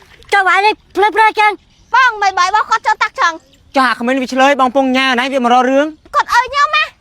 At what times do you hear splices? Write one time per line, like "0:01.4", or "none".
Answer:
0:06.1